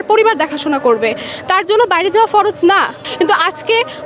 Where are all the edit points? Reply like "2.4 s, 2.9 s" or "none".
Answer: 3.0 s